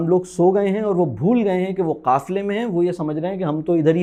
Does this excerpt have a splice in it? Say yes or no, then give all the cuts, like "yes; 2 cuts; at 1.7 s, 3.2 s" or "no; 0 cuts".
no; 0 cuts